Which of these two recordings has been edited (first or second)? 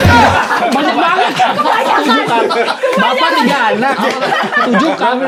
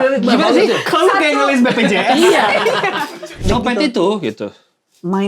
second